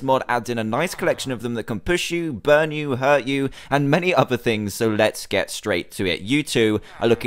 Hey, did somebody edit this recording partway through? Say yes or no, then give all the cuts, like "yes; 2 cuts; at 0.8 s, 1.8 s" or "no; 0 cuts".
no; 0 cuts